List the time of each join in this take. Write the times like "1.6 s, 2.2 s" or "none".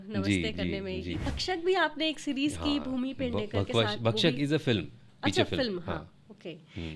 1.4 s